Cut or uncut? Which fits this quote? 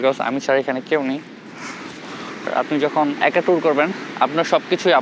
cut